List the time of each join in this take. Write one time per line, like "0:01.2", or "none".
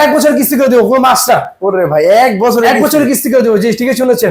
none

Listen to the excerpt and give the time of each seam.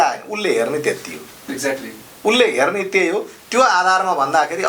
none

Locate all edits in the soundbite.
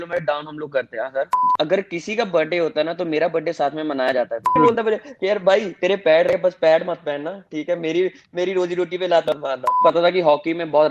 0:01.4
0:04.6
0:09.8

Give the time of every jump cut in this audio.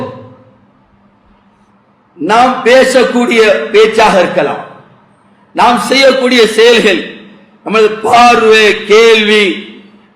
0:01.7

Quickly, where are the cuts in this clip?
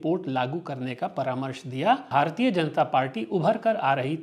0:02.1

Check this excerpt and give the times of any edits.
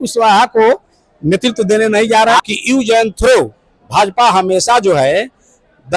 0:02.5

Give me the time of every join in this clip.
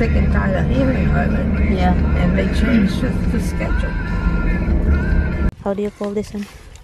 0:05.5

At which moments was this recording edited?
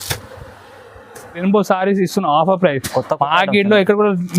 0:01.4

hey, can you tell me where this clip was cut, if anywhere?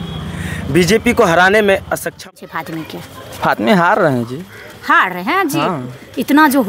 0:02.3

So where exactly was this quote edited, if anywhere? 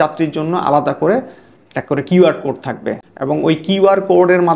none

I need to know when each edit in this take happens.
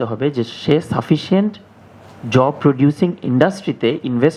none

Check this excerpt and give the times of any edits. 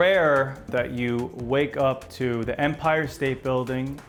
none

